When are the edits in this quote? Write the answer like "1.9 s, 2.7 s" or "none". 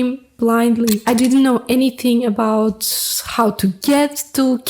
1.0 s